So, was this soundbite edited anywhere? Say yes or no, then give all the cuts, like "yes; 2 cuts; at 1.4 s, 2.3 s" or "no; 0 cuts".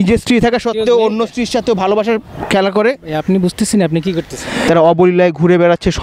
yes; 1 cut; at 4.6 s